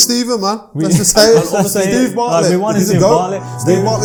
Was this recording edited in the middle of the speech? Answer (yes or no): no